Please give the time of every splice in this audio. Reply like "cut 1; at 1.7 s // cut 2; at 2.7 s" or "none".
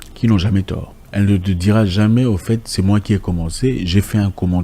cut 1; at 0.9 s